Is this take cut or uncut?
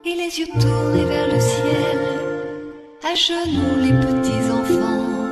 uncut